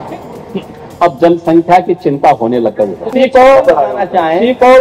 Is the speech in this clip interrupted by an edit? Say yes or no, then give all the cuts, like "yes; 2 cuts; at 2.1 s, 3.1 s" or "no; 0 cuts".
yes; 1 cut; at 3.0 s